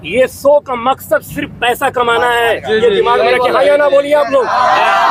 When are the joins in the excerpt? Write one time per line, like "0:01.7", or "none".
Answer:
none